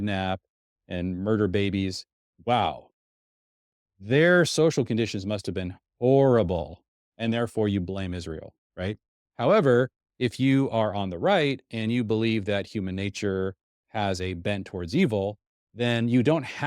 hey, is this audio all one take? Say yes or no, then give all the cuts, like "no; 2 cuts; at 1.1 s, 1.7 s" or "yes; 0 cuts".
yes; 0 cuts